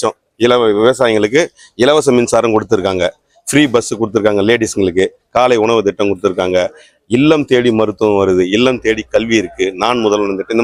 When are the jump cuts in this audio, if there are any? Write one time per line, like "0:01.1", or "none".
none